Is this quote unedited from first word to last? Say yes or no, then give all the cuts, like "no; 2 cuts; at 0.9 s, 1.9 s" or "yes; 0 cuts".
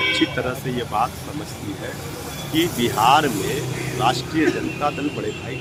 yes; 0 cuts